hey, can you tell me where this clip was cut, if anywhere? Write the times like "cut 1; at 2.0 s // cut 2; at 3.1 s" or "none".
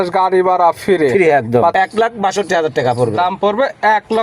cut 1; at 1.7 s